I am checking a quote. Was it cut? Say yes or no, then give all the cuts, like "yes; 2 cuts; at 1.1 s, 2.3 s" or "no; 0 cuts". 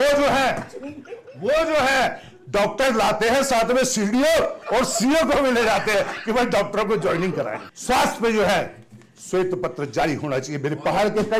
yes; 1 cut; at 7.7 s